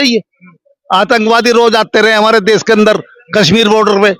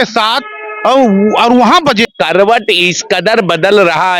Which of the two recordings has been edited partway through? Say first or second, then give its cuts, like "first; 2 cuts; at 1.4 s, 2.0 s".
second; 1 cut; at 2.1 s